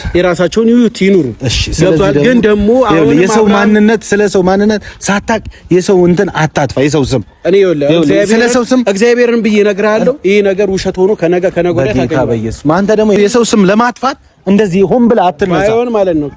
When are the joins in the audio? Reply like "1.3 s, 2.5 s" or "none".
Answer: 13.2 s